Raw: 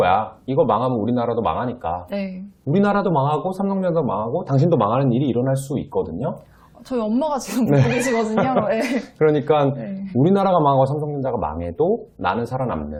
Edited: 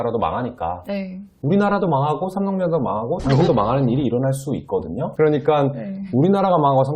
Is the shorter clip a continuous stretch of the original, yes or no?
no